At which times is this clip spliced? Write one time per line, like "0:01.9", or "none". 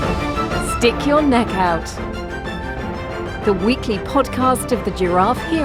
none